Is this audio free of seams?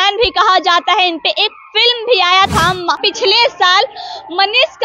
no; 1 cut; at 3.1 s

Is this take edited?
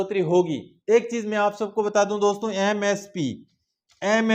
no; 0 cuts

